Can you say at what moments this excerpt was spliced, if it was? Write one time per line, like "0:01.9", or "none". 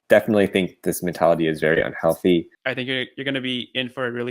0:02.6